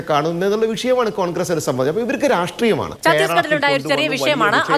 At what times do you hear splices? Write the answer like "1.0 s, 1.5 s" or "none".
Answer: 2.9 s